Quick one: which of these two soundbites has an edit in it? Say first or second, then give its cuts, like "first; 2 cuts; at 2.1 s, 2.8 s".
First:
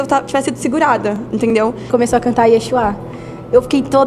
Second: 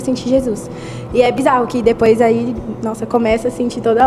first; 1 cut; at 1.9 s